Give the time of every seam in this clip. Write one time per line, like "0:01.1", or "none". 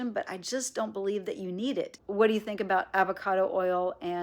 0:02.0